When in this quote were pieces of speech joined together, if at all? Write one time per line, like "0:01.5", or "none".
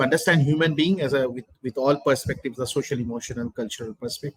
none